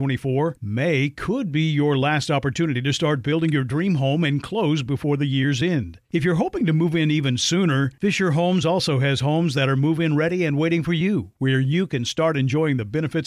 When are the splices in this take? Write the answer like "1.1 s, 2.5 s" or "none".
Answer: none